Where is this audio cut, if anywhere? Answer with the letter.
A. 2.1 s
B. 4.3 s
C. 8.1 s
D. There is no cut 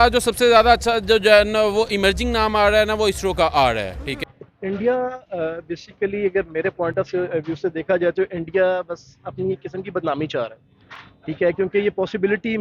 D